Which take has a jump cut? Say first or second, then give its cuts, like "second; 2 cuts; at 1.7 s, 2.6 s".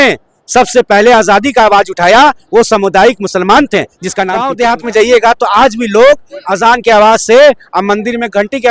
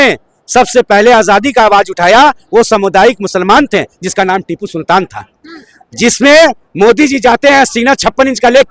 first; 1 cut; at 4.4 s